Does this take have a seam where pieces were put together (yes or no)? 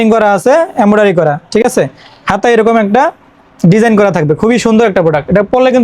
no